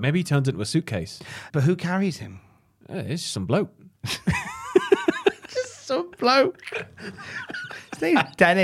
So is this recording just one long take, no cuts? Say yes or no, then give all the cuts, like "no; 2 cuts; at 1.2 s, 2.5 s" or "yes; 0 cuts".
no; 1 cut; at 1.4 s